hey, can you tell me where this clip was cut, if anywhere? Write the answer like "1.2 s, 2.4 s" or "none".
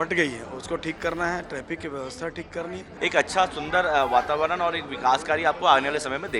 2.9 s